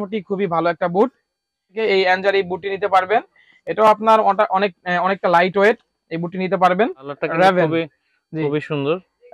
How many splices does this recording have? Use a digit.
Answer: 2